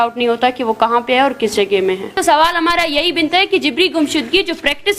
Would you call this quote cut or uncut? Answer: cut